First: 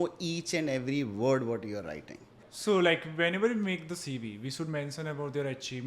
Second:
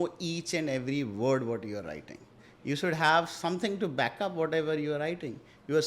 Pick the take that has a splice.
first; 1 cut; at 2.5 s

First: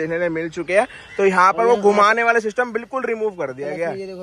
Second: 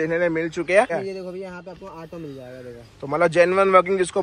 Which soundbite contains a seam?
second; 1 cut; at 0.9 s

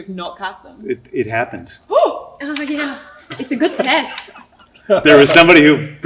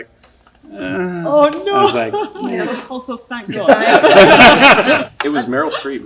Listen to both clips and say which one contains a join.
second; 1 cut; at 5.0 s

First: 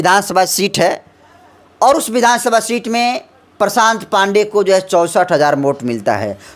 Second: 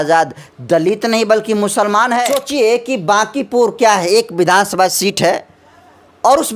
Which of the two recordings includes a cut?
second; 1 cut; at 2.4 s

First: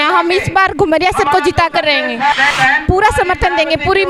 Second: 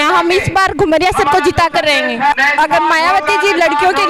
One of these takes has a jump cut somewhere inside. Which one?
first; 1 cut; at 2.5 s

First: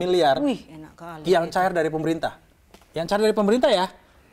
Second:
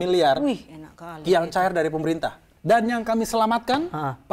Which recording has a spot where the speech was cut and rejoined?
second; 1 cut; at 2.5 s

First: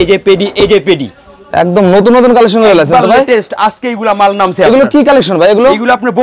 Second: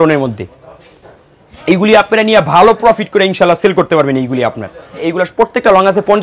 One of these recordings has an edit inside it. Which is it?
second; 1 cut; at 4.9 s

